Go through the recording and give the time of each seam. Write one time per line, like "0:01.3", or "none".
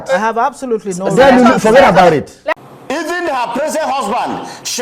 0:02.7